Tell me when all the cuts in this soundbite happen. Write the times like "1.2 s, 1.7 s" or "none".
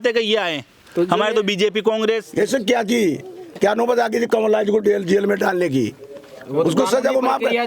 2.3 s